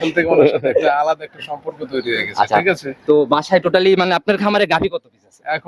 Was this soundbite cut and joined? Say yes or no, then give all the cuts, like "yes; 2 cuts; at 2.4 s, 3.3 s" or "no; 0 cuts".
no; 0 cuts